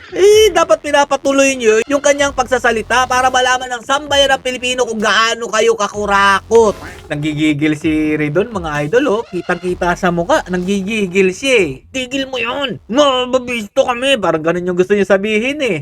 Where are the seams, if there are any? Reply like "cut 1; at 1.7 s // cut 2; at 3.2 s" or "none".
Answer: cut 1; at 7.1 s